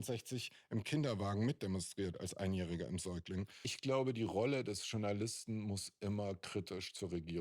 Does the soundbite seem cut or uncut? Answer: cut